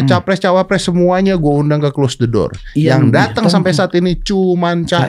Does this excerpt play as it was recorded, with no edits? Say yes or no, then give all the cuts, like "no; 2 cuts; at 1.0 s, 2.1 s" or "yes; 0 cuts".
yes; 0 cuts